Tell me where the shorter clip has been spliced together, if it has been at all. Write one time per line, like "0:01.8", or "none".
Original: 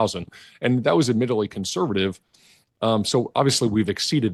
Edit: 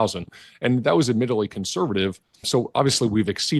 0:02.5